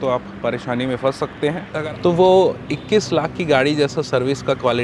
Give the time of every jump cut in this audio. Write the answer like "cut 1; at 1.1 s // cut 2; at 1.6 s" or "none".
cut 1; at 1.6 s